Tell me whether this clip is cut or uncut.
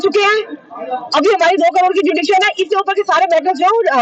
uncut